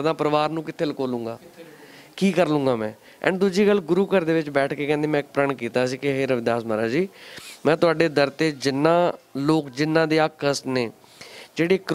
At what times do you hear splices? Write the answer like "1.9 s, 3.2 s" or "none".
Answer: none